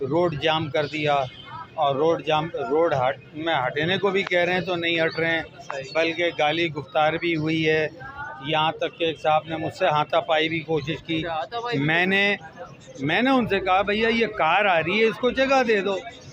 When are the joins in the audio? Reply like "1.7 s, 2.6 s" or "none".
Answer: none